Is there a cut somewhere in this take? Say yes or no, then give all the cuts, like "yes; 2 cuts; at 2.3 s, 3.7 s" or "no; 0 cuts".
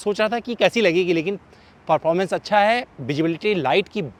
no; 0 cuts